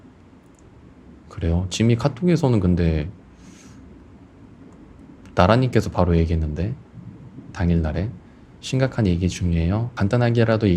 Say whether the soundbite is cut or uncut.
uncut